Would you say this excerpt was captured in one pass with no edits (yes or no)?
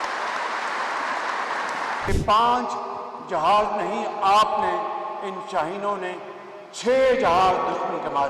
no